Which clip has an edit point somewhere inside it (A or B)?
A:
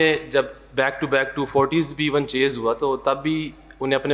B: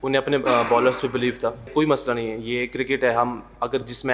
B